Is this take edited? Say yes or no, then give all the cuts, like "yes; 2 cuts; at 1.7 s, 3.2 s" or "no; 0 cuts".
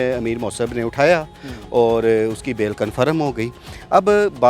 no; 0 cuts